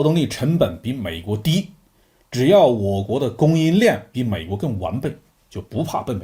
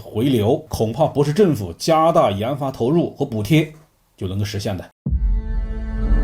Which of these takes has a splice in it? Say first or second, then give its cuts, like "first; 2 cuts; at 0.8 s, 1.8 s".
second; 1 cut; at 4.9 s